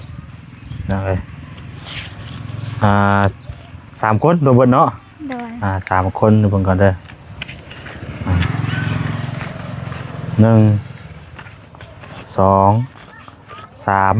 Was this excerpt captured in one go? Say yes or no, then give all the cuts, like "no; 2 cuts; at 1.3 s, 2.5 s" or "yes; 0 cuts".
yes; 0 cuts